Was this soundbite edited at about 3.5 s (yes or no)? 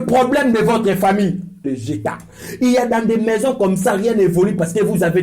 no